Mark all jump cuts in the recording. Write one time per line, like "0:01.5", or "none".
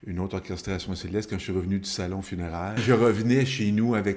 0:02.8